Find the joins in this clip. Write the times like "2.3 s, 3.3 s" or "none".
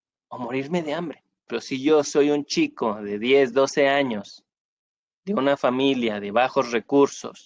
1.5 s